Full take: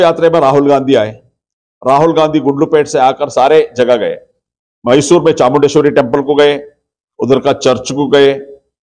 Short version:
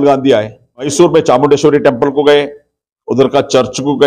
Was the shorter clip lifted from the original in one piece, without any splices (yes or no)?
no